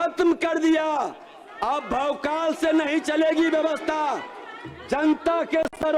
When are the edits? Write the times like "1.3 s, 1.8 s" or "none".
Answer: none